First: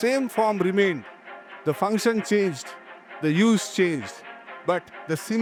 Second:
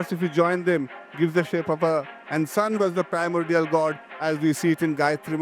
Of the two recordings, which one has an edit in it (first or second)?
second